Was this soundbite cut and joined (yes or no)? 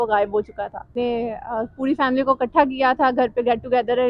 yes